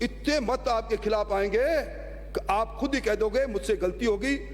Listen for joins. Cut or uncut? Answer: uncut